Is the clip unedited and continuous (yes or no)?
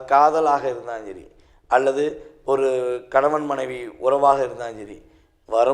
yes